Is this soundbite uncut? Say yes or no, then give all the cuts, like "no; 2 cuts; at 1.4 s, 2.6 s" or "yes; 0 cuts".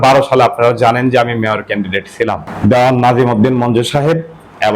no; 1 cut; at 2.5 s